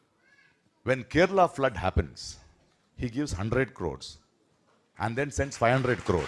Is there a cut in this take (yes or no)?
no